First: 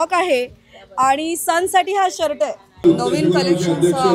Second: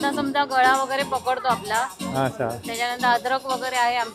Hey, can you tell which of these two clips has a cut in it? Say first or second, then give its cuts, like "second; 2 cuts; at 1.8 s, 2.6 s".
first; 1 cut; at 2.8 s